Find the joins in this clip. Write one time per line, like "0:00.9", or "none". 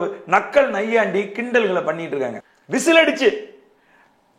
0:02.4